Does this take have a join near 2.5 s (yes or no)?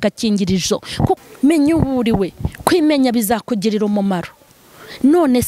no